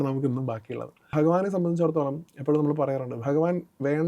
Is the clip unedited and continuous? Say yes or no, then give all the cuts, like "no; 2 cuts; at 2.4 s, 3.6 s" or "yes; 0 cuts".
no; 1 cut; at 1.1 s